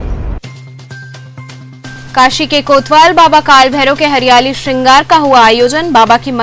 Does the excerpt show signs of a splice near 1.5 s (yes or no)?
yes